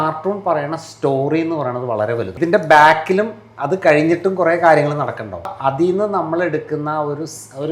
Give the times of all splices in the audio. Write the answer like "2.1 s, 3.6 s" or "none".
2.3 s, 5.5 s